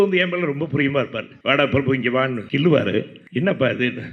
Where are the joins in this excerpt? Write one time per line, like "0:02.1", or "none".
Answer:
0:01.2
0:02.4
0:03.2